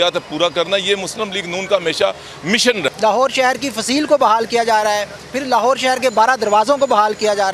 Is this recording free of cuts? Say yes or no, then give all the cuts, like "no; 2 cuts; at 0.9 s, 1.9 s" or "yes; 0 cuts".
no; 1 cut; at 2.9 s